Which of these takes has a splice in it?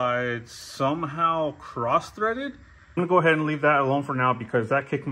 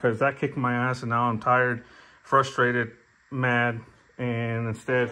first; 1 cut; at 3.0 s

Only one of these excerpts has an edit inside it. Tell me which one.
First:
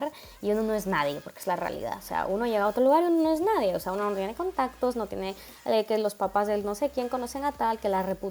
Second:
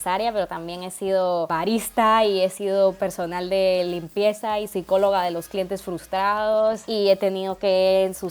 second; 2 cuts; at 1.5 s, 6.8 s

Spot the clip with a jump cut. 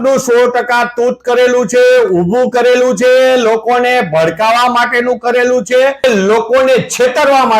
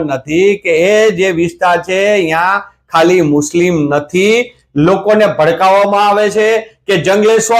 first; 1 cut; at 6.0 s

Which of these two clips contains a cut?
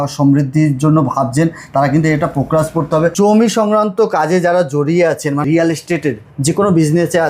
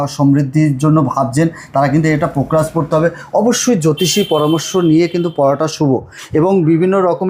first; 2 cuts; at 3.1 s, 5.4 s

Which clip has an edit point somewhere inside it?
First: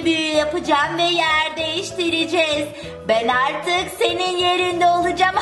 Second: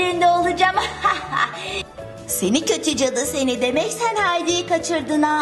second; 1 cut; at 1.8 s

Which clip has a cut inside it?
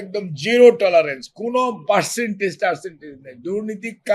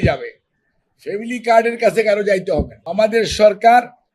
second; 1 cut; at 2.8 s

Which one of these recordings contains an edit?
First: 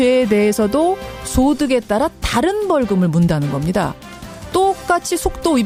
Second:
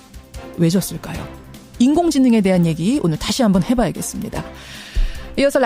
second; 1 cut; at 3.2 s

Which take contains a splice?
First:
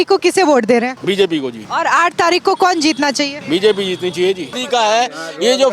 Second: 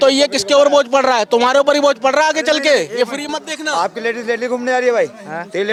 first; 3 cuts; at 1.2 s, 3.4 s, 4.5 s

